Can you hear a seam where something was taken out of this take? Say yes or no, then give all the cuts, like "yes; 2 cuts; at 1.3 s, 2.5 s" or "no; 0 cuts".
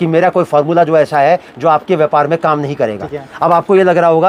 no; 0 cuts